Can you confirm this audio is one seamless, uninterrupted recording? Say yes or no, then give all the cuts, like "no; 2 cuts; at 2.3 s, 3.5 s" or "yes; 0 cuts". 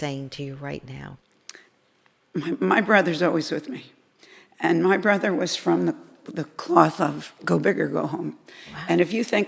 no; 1 cut; at 1.2 s